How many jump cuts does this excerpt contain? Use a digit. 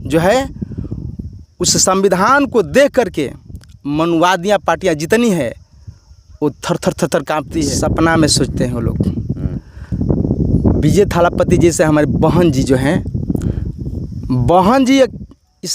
1